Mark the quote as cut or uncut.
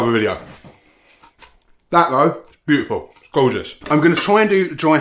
cut